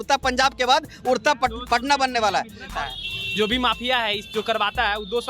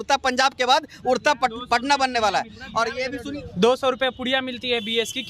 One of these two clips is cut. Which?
first; 1 cut; at 2.7 s

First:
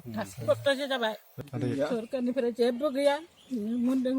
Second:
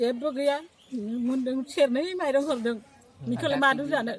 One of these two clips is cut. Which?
first; 1 cut; at 1.4 s

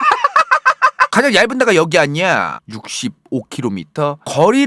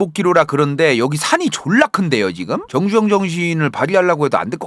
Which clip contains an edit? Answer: first; 1 cut; at 1.1 s

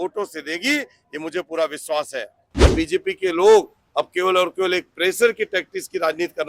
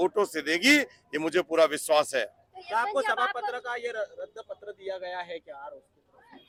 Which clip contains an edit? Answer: first; 1 cut; at 2.6 s

